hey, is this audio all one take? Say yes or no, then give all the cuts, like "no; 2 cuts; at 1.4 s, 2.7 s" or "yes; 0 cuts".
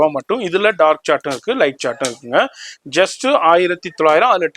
yes; 0 cuts